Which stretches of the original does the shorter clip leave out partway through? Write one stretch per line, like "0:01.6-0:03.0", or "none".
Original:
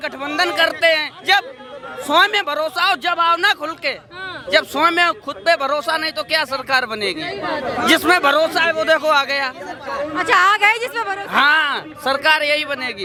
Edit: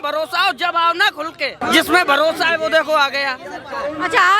0:04.0-0:07.7